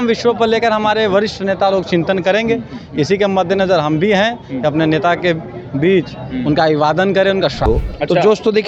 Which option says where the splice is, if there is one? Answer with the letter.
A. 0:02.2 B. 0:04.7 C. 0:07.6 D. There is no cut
C